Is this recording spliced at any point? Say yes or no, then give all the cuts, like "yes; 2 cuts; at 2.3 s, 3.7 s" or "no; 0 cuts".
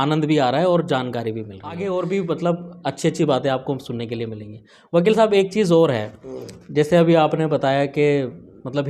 yes; 1 cut; at 1.7 s